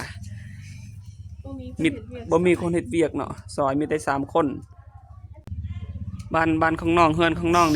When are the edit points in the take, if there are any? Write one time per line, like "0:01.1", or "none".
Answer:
0:05.4